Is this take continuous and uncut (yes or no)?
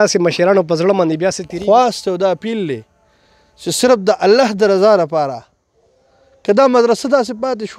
no